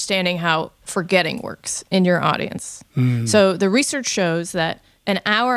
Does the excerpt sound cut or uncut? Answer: uncut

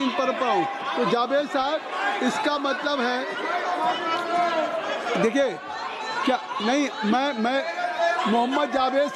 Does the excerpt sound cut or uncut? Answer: uncut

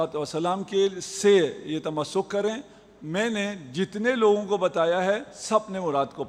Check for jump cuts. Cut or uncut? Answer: uncut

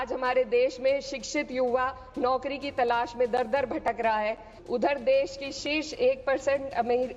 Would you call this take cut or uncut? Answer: cut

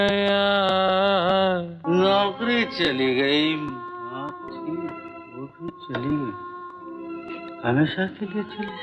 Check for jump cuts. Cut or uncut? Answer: uncut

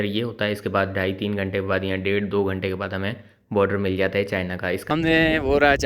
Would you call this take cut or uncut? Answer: cut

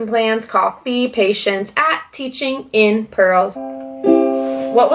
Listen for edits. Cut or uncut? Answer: cut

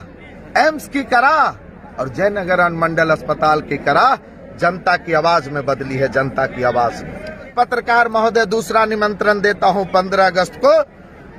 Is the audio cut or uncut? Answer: cut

